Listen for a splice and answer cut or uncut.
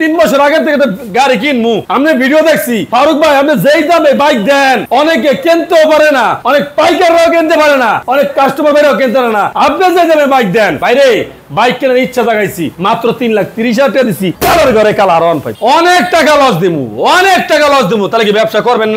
cut